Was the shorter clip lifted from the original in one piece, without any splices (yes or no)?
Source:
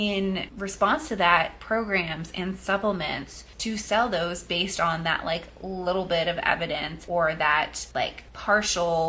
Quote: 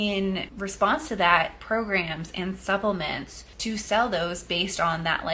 yes